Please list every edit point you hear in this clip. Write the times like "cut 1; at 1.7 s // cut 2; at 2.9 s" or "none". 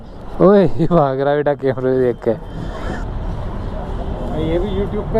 cut 1; at 2.8 s